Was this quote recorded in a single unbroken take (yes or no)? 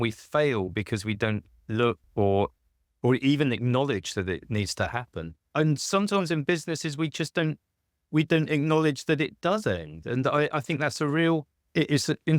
no